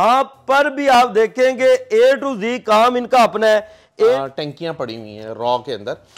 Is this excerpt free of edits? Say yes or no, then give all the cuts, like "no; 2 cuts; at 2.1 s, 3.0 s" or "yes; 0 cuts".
no; 1 cut; at 4.2 s